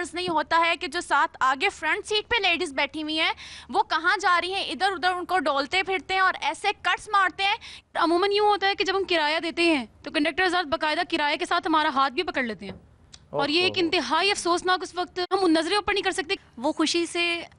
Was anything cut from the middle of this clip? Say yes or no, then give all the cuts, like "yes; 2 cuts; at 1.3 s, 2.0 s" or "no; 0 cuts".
yes; 2 cuts; at 7.7 s, 16.4 s